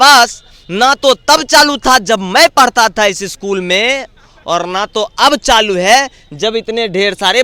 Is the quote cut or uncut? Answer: uncut